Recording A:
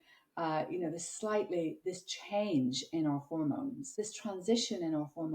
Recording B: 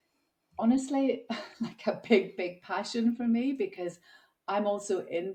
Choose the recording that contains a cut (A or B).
A